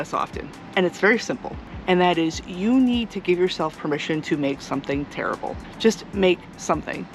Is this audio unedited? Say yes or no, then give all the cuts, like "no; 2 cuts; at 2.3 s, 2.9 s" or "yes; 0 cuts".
yes; 0 cuts